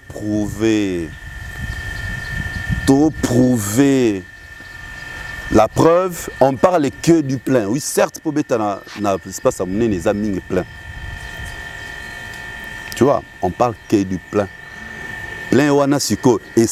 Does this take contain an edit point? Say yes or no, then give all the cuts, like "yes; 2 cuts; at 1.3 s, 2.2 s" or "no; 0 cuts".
no; 0 cuts